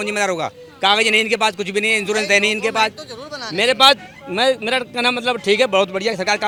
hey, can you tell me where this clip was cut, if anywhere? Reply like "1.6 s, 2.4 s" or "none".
none